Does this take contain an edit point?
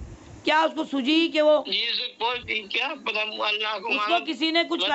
yes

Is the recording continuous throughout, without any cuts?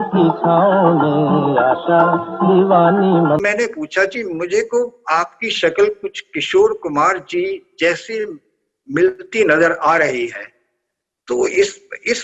no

